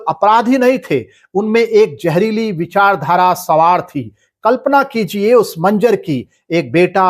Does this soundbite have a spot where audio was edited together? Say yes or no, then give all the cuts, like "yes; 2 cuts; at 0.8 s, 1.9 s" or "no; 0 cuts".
no; 0 cuts